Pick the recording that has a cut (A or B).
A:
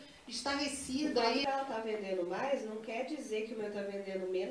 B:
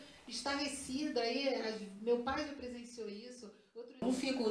A